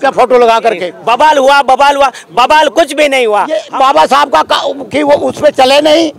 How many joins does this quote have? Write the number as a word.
two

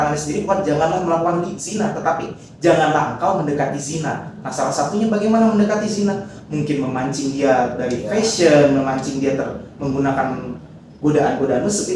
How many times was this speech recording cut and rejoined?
zero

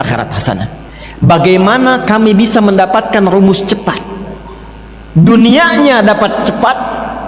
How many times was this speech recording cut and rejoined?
one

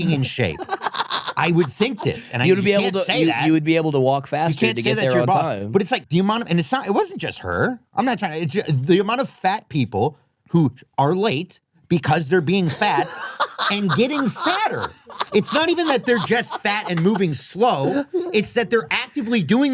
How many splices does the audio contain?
one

